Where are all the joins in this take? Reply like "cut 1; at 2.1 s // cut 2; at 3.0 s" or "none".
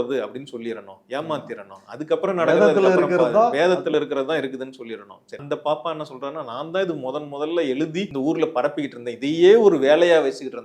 cut 1; at 5.4 s // cut 2; at 8.1 s